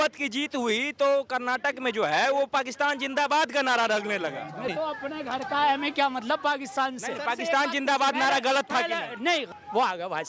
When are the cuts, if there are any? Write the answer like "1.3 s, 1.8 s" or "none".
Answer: 4.7 s, 9.5 s